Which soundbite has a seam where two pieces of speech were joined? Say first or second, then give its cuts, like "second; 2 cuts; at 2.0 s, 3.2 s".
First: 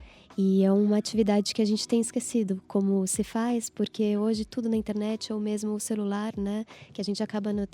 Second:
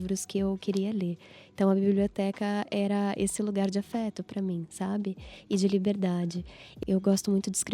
second; 1 cut; at 6.8 s